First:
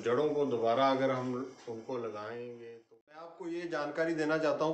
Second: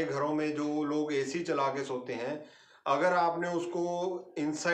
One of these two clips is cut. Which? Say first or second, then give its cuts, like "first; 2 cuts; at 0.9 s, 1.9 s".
first; 1 cut; at 3.4 s